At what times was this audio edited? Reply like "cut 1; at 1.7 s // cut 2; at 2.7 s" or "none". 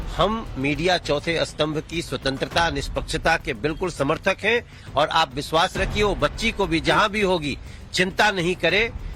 none